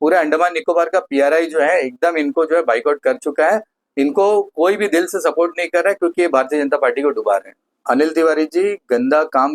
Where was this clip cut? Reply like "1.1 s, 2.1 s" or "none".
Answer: 7.7 s

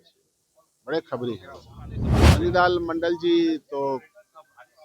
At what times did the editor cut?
2.1 s

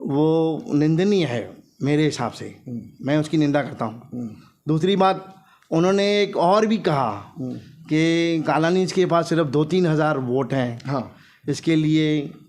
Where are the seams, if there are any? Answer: none

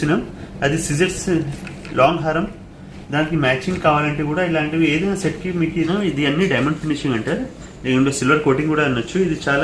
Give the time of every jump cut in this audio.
5.9 s

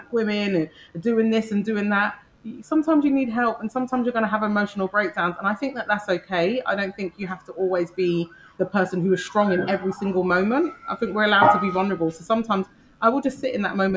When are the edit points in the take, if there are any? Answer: 8.5 s

